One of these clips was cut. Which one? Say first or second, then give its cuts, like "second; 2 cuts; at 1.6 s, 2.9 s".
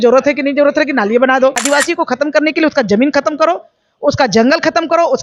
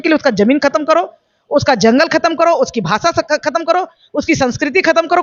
first; 1 cut; at 1.6 s